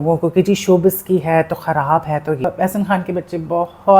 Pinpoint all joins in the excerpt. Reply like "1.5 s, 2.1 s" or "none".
2.4 s